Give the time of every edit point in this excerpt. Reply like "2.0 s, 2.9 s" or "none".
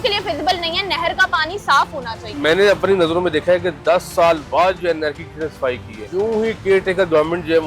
2.2 s, 6.0 s